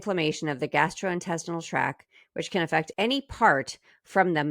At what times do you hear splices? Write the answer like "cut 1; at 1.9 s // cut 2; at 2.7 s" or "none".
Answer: cut 1; at 2.9 s